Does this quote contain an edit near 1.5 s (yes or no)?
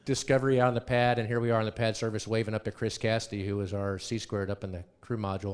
yes